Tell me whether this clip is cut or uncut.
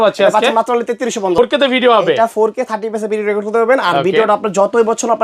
cut